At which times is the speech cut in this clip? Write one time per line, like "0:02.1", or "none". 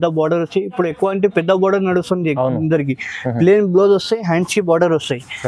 none

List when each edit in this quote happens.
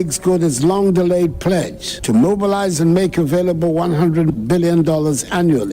0:04.3

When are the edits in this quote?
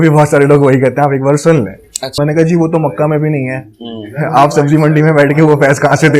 0:02.1

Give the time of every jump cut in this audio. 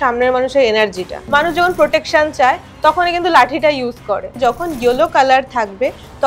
0:01.2
0:04.3

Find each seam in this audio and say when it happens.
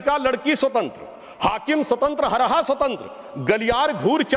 none

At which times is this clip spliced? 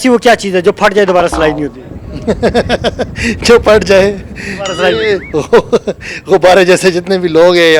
0:05.3

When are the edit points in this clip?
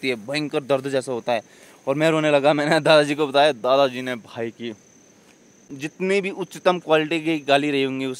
0:05.9

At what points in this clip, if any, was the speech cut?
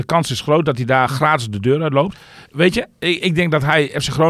0:02.3

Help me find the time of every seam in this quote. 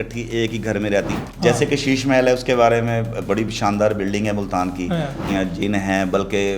0:01.1
0:05.3

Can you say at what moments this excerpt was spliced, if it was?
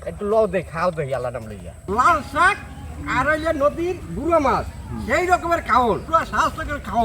0:01.9
0:06.0

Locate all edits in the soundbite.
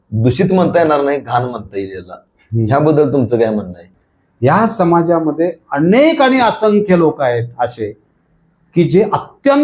0:04.0

